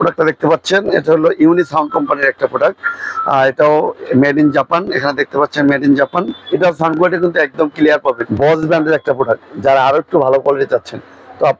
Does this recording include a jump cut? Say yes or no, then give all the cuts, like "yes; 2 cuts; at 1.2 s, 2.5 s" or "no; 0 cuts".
yes; 2 cuts; at 6.4 s, 8.3 s